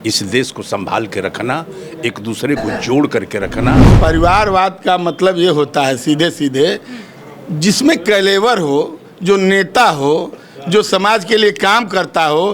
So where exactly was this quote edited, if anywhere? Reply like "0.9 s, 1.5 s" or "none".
3.9 s